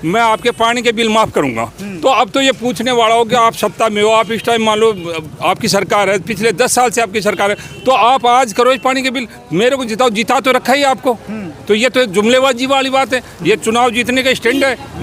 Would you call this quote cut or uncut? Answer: uncut